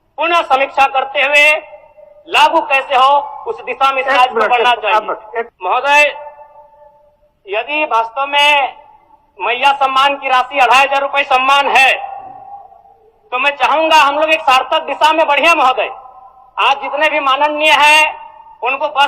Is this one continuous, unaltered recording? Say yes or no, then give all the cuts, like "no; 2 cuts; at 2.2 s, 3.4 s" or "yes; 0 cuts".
no; 1 cut; at 5.5 s